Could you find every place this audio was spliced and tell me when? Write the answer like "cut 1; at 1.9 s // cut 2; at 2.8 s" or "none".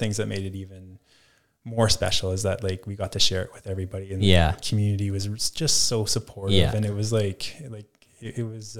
none